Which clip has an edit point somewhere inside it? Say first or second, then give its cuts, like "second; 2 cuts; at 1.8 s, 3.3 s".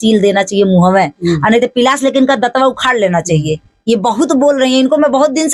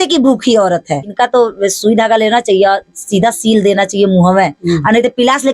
second; 1 cut; at 1.1 s